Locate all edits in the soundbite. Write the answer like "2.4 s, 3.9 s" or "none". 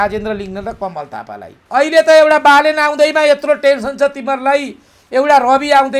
1.5 s